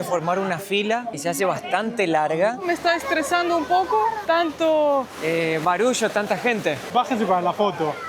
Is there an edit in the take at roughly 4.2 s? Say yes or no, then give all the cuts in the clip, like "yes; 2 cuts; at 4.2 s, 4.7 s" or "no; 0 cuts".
yes; 5 cuts; at 1.1 s, 2.6 s, 4.2 s, 5.1 s, 6.9 s